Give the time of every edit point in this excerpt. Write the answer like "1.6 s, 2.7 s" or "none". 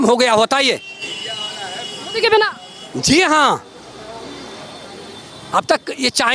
none